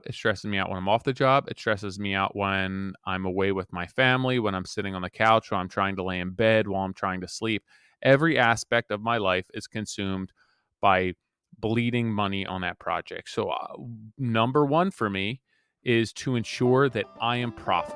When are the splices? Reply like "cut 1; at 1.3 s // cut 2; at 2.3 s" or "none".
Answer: none